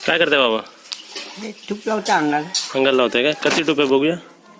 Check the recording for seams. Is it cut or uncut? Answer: uncut